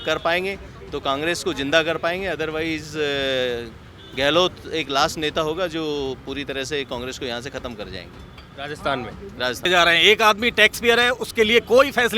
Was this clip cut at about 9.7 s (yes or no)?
yes